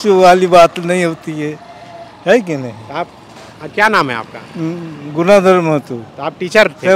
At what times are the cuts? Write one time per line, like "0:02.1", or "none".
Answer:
none